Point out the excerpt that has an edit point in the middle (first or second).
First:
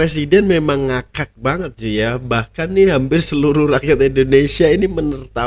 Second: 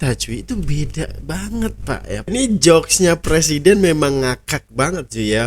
second